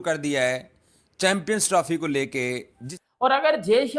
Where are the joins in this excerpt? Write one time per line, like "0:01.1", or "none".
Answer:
0:02.9